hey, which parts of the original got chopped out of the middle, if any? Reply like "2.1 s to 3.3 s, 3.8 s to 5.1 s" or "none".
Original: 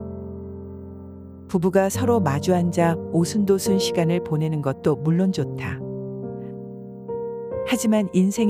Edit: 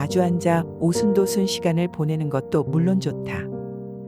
5.4 s to 5.8 s

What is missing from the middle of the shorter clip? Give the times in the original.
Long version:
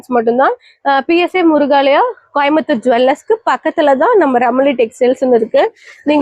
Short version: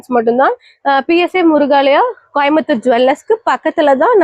none

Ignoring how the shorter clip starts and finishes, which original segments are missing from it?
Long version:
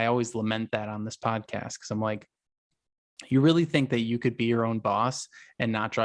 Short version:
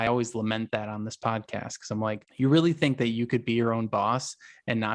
2.3 s to 3.2 s

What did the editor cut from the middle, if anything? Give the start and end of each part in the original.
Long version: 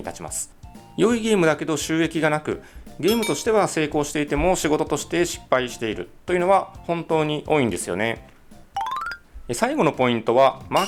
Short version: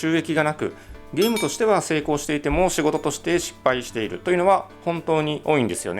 6.0 s to 6.2 s

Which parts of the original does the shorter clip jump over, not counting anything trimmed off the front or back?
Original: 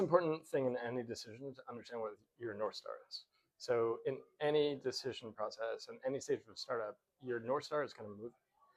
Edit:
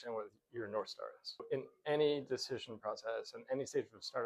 3.3 s to 4.0 s

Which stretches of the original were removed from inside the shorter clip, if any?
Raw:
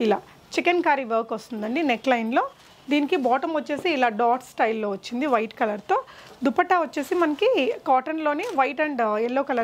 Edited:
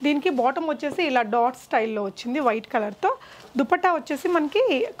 none

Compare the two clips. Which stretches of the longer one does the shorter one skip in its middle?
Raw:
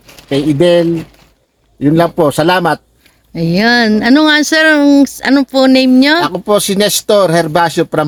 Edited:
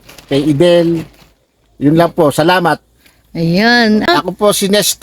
4.0 s to 6.1 s

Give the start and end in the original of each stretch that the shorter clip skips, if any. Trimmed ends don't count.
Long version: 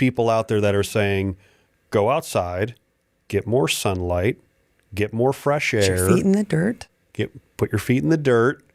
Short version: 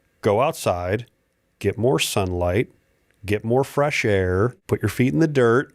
6.1 s to 7.3 s

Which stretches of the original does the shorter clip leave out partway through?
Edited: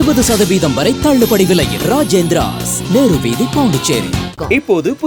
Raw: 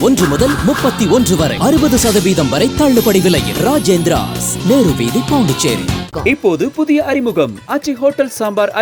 none

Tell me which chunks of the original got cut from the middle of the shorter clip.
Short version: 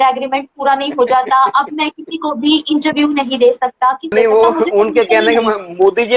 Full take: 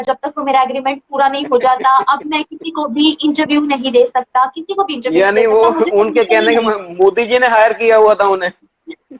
4.7 s to 5.3 s

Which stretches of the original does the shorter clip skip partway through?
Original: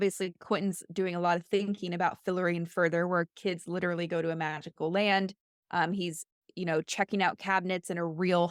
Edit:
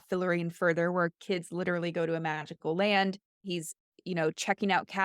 5.6 s to 6.0 s

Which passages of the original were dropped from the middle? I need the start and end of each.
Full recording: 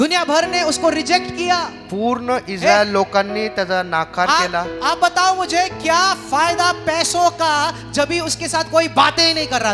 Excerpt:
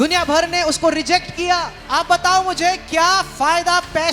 1.8 s to 4.7 s

